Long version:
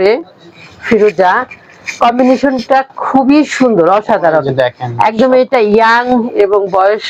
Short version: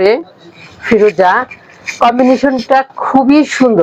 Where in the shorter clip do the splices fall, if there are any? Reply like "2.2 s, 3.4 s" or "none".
none

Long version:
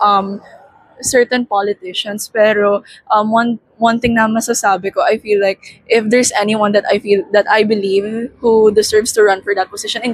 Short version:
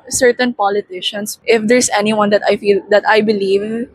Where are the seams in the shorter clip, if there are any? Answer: 1.3 s

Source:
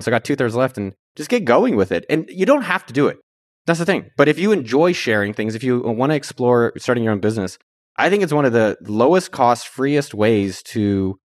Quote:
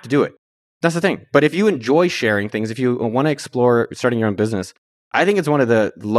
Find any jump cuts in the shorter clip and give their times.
none

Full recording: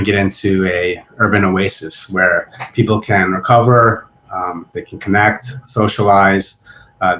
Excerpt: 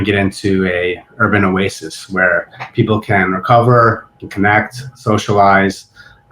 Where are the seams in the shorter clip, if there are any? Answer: 4.2 s

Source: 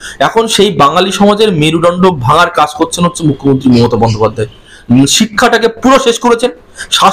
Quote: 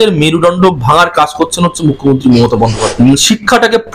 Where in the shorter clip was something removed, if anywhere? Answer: 2.8 s

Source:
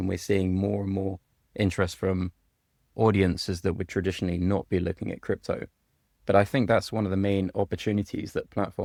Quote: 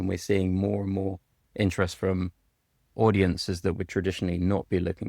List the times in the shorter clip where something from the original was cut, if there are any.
none

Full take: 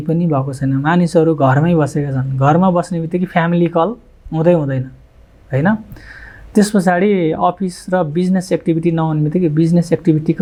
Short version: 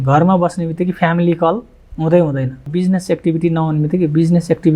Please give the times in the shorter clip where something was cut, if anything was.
2.7 s

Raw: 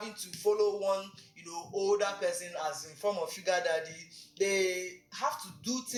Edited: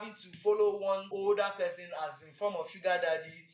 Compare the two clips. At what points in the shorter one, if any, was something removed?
1.1 s

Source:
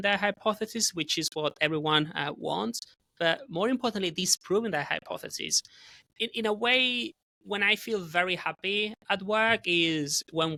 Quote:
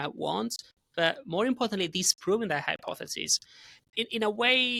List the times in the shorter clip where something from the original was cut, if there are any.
none

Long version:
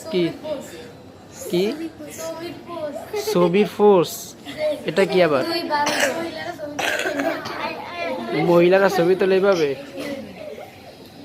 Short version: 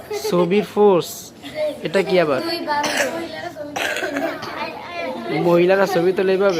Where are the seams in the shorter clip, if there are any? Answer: none

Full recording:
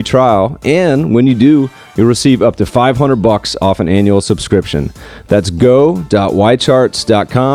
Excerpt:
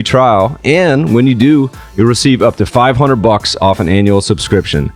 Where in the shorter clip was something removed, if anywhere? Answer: none

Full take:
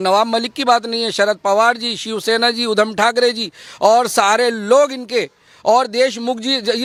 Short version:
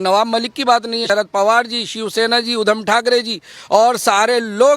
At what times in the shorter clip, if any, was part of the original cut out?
1.0 s

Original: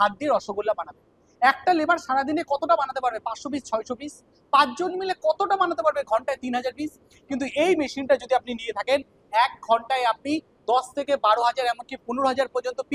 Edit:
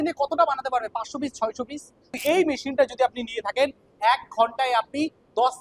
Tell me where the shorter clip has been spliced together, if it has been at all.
2.1 s

